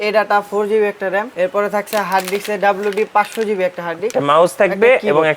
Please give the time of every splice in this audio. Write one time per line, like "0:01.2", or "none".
0:01.3
0:04.1